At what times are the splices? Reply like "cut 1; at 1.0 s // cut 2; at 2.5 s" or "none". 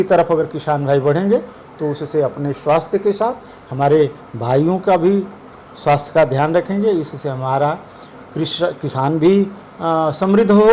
none